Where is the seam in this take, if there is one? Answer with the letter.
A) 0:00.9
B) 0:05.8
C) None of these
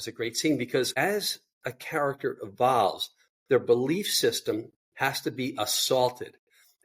A